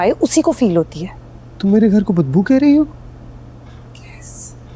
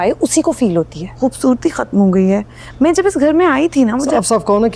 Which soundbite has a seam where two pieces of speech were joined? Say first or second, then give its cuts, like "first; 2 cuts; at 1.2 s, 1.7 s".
second; 1 cut; at 1.0 s